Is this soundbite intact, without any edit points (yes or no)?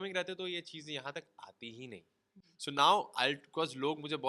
no